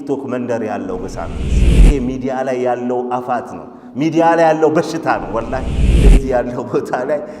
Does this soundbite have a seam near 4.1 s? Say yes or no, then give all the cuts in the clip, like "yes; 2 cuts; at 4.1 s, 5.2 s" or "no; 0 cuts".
no; 1 cut; at 6.0 s